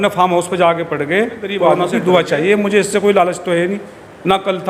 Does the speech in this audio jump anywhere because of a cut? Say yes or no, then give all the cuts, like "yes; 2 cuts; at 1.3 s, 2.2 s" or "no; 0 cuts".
yes; 1 cut; at 1.6 s